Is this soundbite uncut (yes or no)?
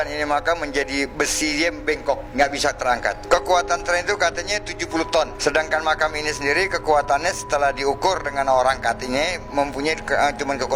yes